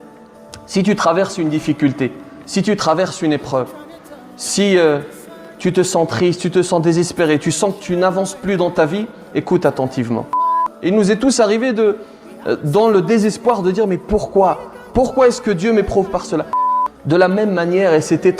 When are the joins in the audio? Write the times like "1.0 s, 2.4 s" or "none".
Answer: 10.6 s, 16.7 s